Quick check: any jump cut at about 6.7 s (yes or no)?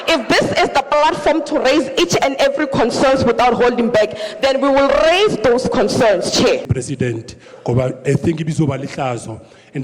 yes